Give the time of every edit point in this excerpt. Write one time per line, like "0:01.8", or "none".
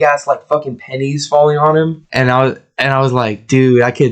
0:02.0